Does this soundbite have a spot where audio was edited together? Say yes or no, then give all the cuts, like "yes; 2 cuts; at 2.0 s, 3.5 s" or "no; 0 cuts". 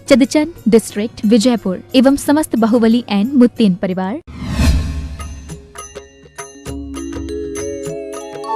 yes; 1 cut; at 4.3 s